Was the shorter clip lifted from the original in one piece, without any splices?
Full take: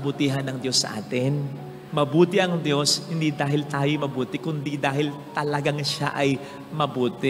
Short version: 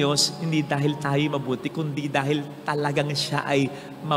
yes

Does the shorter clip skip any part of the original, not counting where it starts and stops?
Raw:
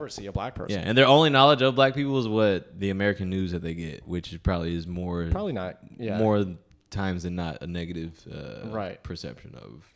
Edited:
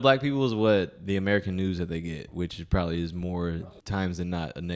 yes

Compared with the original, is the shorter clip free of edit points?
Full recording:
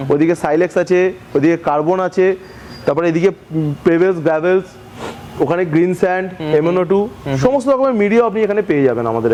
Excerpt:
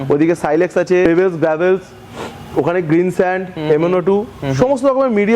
no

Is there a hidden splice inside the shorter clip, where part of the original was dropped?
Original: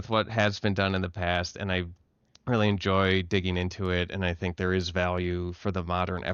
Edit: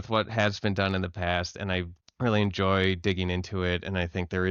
yes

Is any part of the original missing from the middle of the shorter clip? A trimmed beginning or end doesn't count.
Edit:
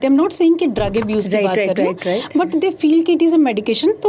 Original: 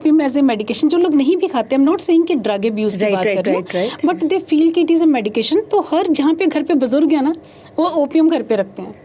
no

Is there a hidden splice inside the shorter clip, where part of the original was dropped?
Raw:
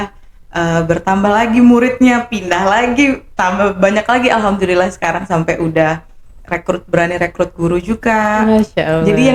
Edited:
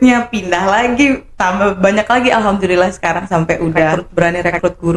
yes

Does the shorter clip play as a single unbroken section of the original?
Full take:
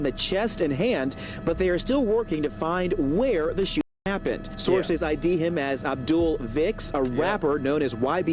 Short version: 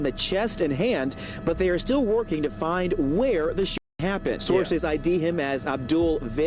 no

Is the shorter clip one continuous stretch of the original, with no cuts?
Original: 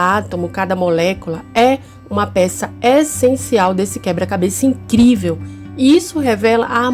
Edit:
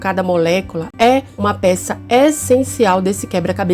no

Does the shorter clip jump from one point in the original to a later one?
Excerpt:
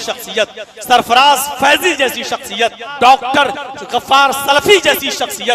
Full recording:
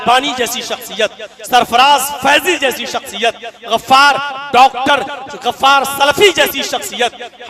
yes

